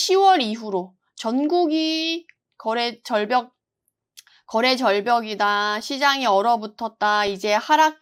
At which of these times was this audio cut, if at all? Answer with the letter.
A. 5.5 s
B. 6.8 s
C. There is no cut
C